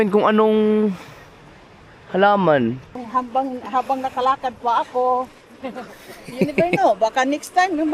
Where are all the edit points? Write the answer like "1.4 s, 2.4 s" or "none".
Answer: 3.0 s

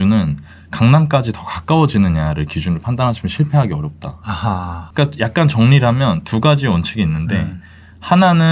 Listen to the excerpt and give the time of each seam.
4.8 s

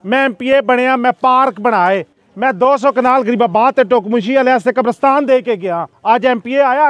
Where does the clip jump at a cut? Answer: 5.9 s

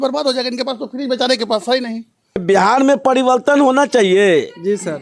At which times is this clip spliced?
2.4 s

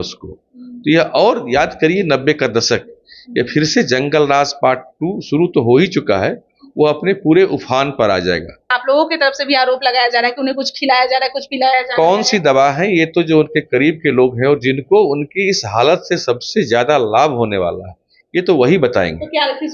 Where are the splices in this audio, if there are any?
8.7 s

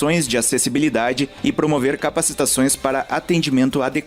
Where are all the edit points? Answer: 1.3 s

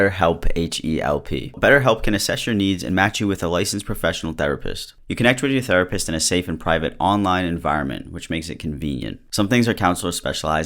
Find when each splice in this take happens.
1.5 s, 9.2 s

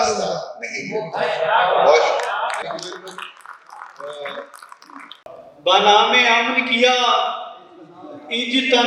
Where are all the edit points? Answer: none

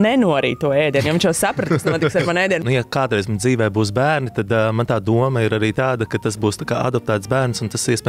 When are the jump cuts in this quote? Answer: 2.6 s

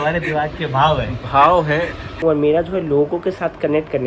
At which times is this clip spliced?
2.1 s

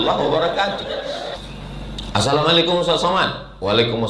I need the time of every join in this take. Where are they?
1.3 s

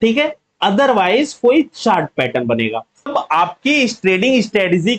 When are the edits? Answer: 3.1 s

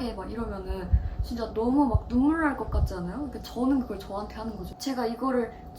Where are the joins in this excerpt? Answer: 4.7 s

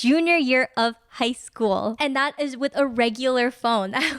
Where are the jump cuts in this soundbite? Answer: 2.0 s

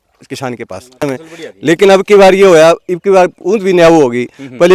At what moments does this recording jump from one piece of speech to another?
1.0 s

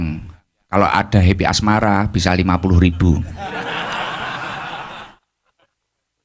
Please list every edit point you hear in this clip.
none

